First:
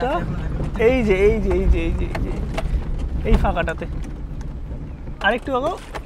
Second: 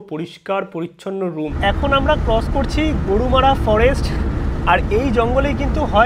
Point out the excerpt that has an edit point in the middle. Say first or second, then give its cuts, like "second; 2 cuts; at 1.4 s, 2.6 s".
second; 1 cut; at 1.5 s